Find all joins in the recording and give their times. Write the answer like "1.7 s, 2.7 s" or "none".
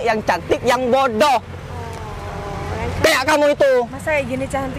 none